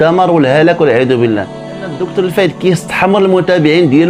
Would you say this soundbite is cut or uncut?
cut